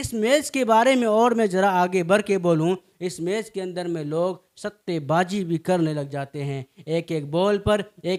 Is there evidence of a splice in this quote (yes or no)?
no